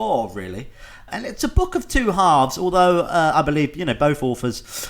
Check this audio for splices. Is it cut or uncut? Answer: cut